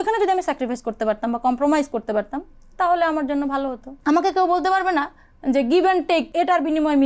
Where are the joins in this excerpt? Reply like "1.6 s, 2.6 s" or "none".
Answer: 3.9 s, 6.3 s